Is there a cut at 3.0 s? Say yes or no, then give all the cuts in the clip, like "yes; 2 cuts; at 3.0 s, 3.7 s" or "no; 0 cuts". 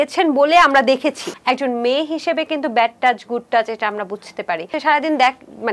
no; 2 cuts; at 1.3 s, 4.7 s